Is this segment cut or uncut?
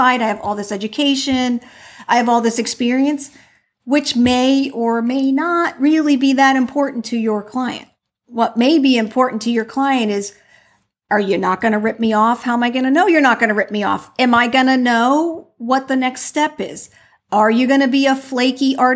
uncut